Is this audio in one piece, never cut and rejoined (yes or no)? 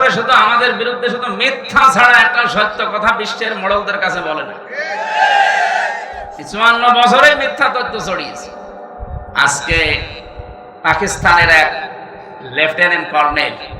no